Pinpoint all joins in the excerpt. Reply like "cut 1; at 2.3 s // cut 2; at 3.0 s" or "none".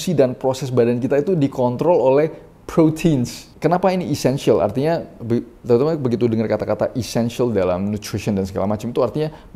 cut 1; at 3.4 s

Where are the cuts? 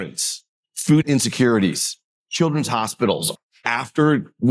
cut 1; at 0.9 s // cut 2; at 3.4 s

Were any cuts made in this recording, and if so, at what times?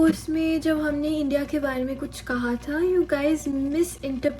none

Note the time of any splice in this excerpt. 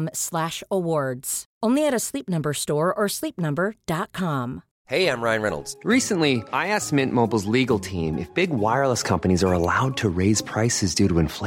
cut 1; at 4.7 s

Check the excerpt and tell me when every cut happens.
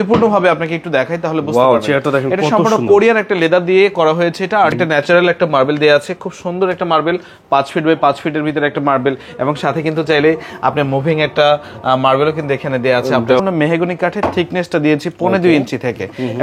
cut 1; at 4.7 s // cut 2; at 13.4 s

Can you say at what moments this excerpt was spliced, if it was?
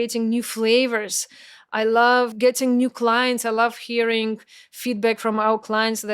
cut 1; at 2.3 s

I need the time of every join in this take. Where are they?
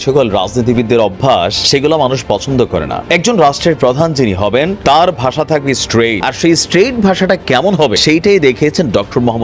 cut 1; at 1.6 s // cut 2; at 3.0 s // cut 3; at 4.8 s // cut 4; at 6.2 s // cut 5; at 8.0 s

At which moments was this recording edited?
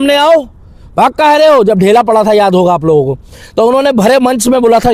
none

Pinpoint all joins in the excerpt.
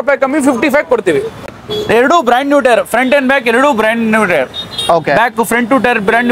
cut 1; at 1.5 s

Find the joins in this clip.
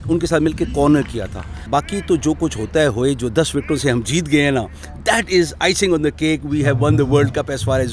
cut 1; at 1.7 s

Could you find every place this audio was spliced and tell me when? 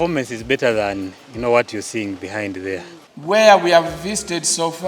cut 1; at 3.1 s

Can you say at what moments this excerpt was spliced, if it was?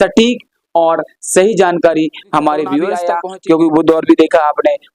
cut 1; at 3.1 s

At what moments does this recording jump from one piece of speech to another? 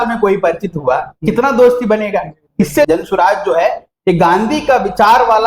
cut 1; at 2.9 s

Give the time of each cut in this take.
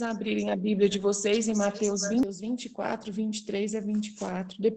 cut 1; at 2.2 s

